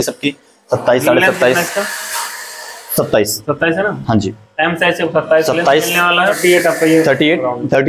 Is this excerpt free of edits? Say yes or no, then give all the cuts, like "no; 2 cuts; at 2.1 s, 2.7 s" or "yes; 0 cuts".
no; 1 cut; at 6.4 s